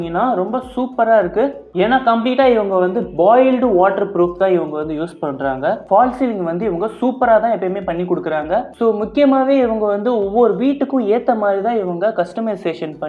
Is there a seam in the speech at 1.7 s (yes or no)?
yes